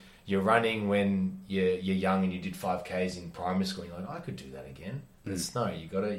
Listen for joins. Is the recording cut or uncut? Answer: uncut